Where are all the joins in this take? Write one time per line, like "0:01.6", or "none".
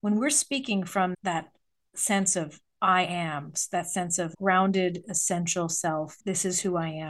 0:01.1
0:06.1